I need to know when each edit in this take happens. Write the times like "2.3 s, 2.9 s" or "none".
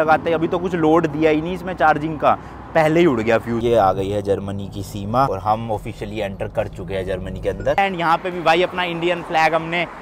3.6 s, 7.8 s